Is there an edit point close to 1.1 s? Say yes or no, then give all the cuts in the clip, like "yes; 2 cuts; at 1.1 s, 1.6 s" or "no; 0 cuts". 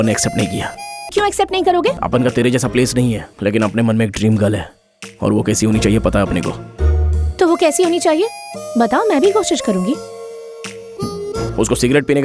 yes; 3 cuts; at 1.1 s, 2.0 s, 3.3 s